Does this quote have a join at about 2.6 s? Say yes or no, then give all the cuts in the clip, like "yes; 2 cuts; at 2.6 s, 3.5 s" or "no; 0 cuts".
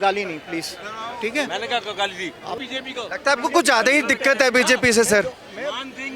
yes; 1 cut; at 2.6 s